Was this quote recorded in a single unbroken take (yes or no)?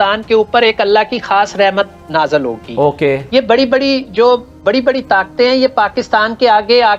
yes